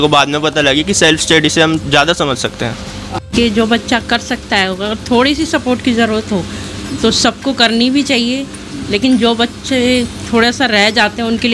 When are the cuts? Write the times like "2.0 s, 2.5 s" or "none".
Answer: 3.3 s